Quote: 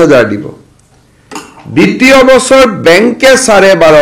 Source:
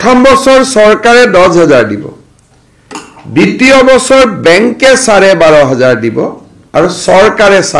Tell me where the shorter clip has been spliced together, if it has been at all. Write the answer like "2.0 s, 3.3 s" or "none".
none